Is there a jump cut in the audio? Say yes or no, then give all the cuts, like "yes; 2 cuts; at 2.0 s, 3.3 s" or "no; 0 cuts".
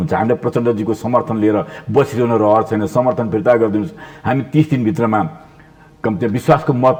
no; 0 cuts